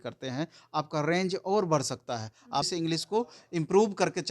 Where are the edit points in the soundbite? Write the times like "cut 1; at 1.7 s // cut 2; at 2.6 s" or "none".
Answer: cut 1; at 2.7 s